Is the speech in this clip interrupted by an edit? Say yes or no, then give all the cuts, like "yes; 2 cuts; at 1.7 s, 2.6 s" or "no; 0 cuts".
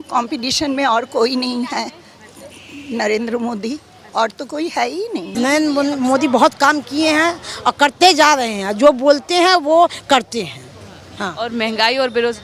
yes; 1 cut; at 5.4 s